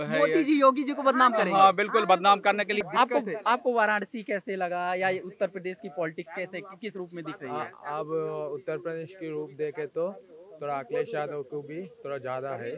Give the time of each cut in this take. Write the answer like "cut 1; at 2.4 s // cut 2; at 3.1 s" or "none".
cut 1; at 2.8 s